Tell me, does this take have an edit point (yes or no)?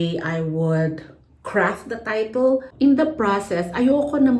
yes